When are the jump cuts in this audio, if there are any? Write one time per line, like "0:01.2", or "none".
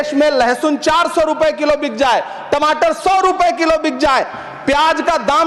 none